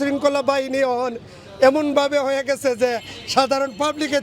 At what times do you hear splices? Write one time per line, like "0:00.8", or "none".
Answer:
none